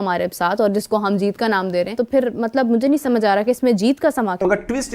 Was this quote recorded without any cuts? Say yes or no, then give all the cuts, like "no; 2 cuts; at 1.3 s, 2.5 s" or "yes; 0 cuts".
no; 1 cut; at 2.0 s